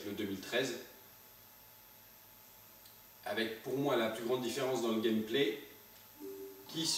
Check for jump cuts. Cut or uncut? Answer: cut